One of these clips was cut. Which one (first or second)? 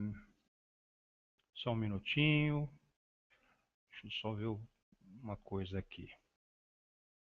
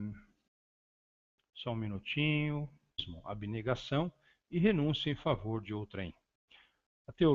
first